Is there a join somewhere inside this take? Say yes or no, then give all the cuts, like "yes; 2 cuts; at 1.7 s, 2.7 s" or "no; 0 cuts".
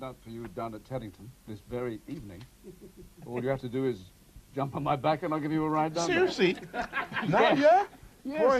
yes; 1 cut; at 2.1 s